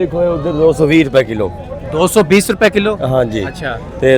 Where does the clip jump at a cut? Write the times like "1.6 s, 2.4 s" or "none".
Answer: none